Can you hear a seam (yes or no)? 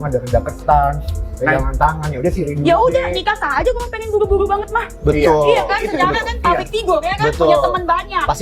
no